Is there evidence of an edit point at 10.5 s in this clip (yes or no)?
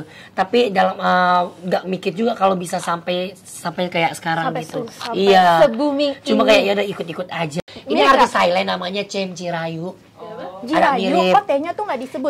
no